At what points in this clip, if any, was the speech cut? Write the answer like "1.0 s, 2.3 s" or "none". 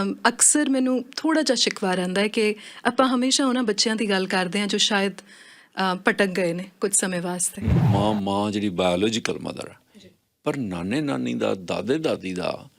7.9 s